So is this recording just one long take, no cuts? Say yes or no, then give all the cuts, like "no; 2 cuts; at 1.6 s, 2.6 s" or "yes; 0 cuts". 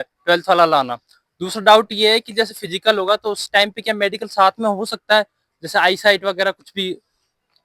yes; 0 cuts